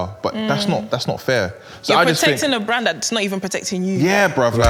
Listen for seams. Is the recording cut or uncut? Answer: uncut